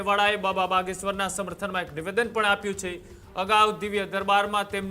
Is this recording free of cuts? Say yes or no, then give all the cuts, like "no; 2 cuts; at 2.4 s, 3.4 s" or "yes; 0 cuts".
yes; 0 cuts